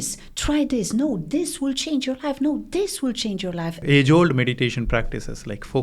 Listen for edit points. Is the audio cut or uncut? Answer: cut